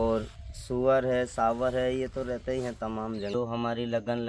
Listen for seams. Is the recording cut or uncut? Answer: cut